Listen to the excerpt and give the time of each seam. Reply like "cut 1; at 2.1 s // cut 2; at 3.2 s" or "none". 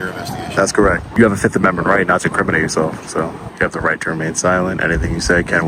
cut 1; at 1.1 s // cut 2; at 3.4 s